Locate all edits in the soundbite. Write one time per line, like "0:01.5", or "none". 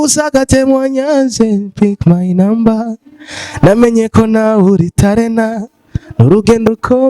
none